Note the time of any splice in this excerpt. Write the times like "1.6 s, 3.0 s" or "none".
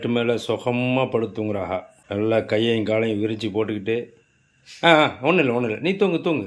2.0 s